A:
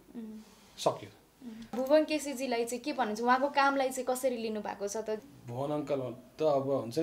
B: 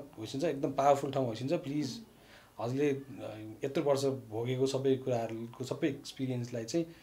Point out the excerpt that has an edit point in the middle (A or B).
A